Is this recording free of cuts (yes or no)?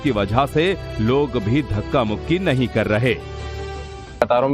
no